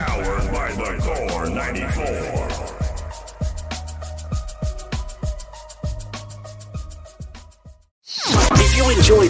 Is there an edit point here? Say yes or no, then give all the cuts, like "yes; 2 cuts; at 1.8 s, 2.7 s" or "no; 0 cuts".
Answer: no; 0 cuts